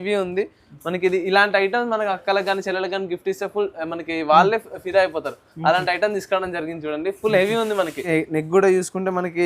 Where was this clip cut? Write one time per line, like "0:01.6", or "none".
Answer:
0:08.1